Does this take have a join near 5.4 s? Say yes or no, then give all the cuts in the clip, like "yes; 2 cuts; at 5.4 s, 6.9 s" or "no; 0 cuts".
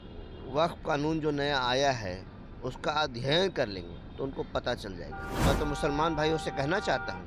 yes; 1 cut; at 5.4 s